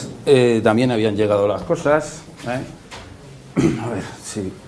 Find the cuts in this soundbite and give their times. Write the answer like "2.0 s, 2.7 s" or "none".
0.9 s